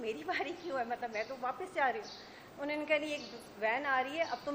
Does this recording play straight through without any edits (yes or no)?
yes